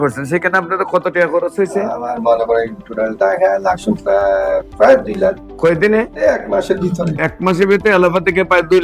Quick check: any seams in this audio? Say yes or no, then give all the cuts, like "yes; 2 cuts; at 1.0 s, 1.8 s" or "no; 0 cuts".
no; 0 cuts